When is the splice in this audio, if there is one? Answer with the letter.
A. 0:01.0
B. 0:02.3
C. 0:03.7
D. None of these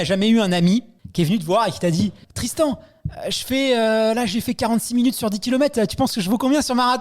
A